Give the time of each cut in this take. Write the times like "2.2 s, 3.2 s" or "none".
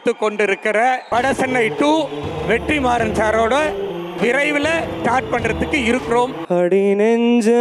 1.0 s, 6.4 s